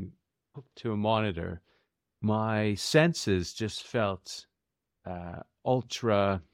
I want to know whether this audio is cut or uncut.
uncut